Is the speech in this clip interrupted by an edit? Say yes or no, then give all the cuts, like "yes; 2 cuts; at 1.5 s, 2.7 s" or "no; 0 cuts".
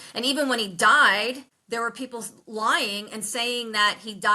yes; 1 cut; at 1.5 s